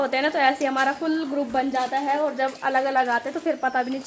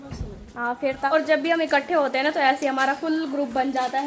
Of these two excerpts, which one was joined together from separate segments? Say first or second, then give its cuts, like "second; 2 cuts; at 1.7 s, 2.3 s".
second; 1 cut; at 1.1 s